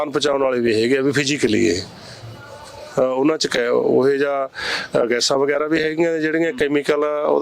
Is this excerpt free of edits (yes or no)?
yes